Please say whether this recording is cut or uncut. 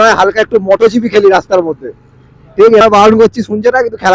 cut